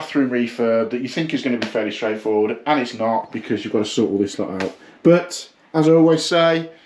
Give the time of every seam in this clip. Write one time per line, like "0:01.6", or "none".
none